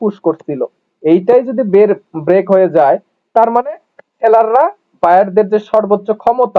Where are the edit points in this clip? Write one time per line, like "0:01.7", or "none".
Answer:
none